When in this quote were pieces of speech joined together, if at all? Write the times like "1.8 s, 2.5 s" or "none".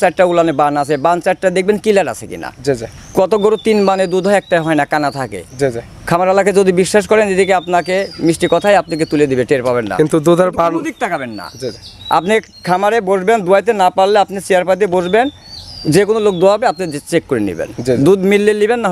none